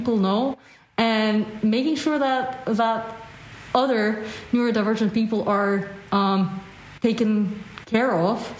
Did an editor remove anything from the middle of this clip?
no; 0 cuts

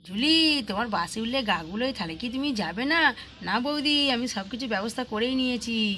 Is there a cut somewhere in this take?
no; 0 cuts

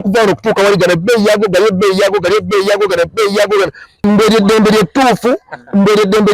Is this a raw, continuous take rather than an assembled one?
no; 1 cut; at 3.9 s

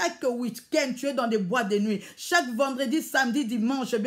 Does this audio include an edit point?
no; 0 cuts

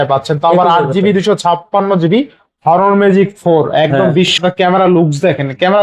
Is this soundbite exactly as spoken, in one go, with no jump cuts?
no; 1 cut; at 4.3 s

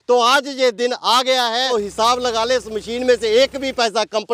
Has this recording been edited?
yes; 1 cut; at 1.7 s

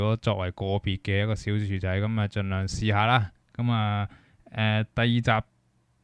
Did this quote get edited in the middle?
no; 0 cuts

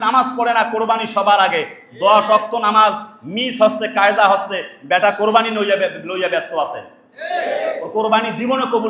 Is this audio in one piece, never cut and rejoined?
yes; 0 cuts

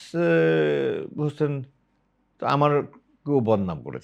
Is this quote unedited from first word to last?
yes; 0 cuts

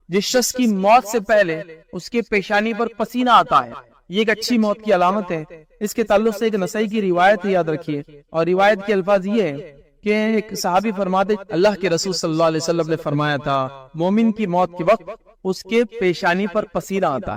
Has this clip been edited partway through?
no; 0 cuts

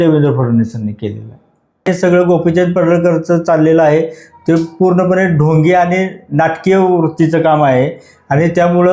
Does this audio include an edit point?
yes; 1 cut; at 1.9 s

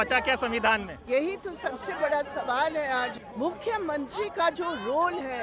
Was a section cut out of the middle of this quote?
yes; 2 cuts; at 1.1 s, 3.2 s

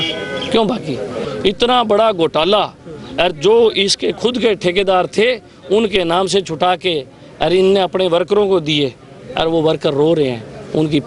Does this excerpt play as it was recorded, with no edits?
no; 1 cut; at 1.3 s

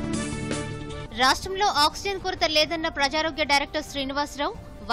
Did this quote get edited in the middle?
yes; 1 cut; at 0.9 s

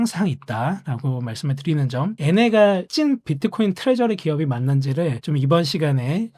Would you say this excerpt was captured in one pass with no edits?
no; 2 cuts; at 2.2 s, 5.2 s

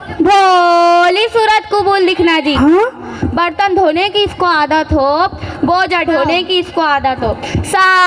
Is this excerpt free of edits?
no; 1 cut; at 2.5 s

